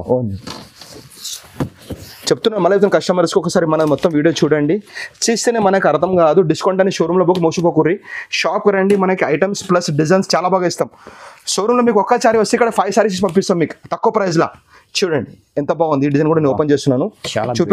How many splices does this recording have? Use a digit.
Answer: 0